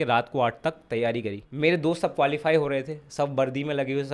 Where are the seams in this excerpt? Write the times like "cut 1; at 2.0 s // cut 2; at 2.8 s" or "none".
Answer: cut 1; at 1.4 s